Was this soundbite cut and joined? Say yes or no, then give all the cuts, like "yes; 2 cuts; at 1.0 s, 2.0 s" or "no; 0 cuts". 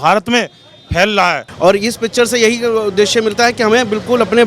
yes; 1 cut; at 1.4 s